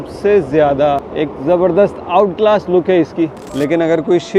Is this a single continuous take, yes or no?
no